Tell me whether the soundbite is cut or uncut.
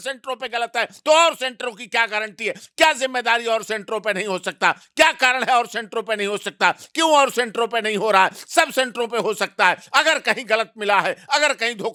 uncut